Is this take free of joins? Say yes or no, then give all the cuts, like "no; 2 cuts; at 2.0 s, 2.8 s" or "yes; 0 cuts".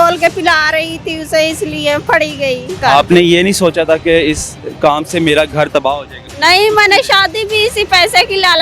no; 2 cuts; at 2.8 s, 6.3 s